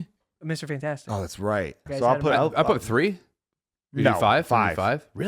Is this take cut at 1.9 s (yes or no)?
yes